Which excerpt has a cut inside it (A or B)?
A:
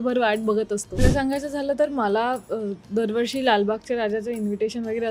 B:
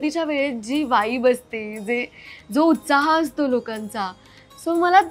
A